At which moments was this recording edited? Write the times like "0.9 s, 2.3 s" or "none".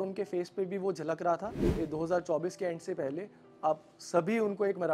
1.6 s